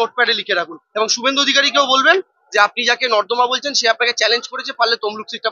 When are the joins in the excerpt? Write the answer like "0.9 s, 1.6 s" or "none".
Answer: 4.6 s